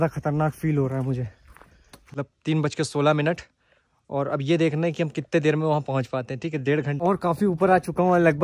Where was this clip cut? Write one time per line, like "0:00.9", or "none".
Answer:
0:02.0
0:07.0